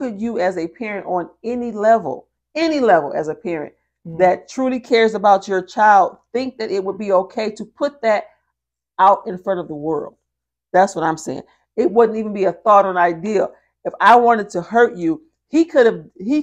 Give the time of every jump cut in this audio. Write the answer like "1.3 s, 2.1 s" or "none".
none